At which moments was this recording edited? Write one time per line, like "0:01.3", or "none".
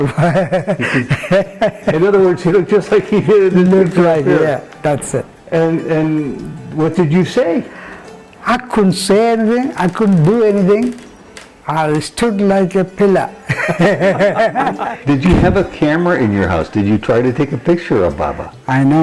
0:14.8